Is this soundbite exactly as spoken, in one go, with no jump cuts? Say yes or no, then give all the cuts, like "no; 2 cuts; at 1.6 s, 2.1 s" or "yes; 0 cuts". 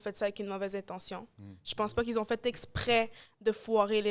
yes; 0 cuts